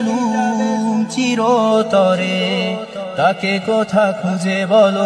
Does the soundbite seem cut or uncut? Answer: uncut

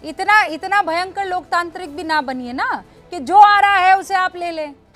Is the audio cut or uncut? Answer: uncut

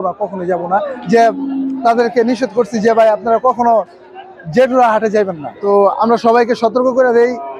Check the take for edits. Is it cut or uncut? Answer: cut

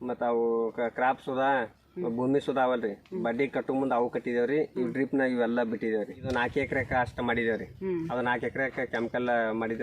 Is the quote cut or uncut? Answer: cut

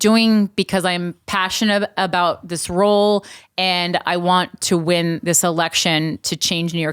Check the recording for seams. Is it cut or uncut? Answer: uncut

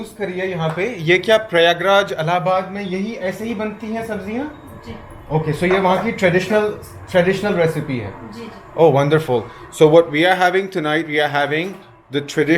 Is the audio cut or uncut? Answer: uncut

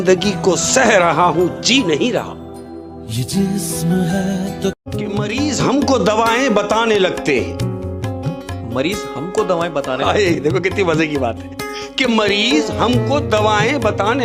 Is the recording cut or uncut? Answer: uncut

